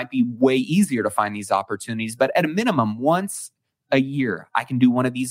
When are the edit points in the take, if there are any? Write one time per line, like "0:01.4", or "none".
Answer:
none